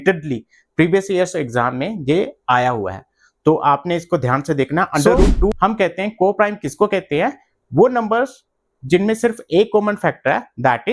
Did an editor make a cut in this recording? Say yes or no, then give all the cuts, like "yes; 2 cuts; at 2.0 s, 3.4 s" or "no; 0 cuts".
yes; 1 cut; at 5.5 s